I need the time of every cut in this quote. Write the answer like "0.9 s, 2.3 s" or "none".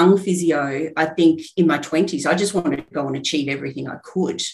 2.9 s